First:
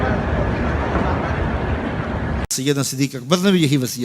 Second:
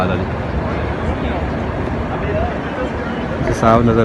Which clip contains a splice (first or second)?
first